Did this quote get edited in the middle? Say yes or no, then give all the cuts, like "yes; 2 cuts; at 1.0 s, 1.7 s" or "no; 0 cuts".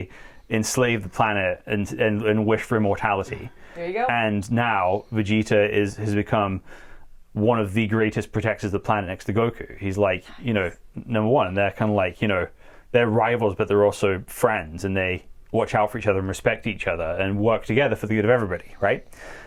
no; 0 cuts